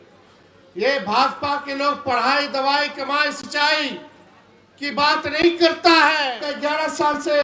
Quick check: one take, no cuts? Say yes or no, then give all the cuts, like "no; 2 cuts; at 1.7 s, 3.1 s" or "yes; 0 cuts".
no; 1 cut; at 6.4 s